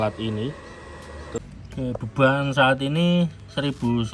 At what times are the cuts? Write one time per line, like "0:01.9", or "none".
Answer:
0:01.4